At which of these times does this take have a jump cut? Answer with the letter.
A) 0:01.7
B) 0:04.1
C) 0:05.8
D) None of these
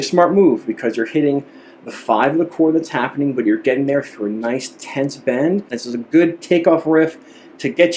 C